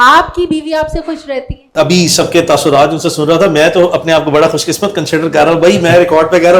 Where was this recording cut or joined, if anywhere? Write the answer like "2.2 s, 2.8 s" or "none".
1.5 s